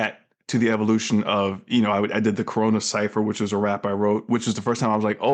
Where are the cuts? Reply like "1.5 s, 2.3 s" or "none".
none